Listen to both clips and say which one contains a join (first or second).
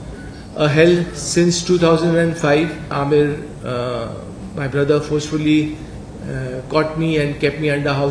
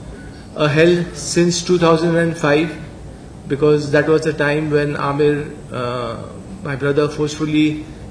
first